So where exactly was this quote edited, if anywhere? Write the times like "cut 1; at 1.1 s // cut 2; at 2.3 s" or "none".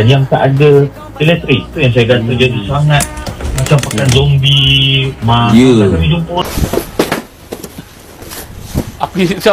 cut 1; at 6.4 s